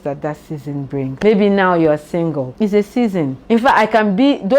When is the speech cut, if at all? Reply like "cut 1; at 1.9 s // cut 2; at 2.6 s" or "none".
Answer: cut 1; at 1.1 s // cut 2; at 2.5 s // cut 3; at 3.4 s